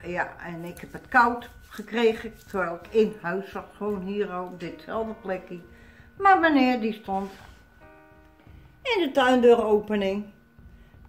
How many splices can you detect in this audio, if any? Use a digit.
0